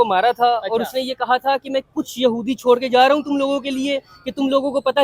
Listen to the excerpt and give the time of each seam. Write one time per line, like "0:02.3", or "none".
none